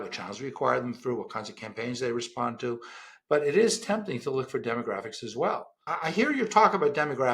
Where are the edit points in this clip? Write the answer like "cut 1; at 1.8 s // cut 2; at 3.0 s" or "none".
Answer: cut 1; at 5.9 s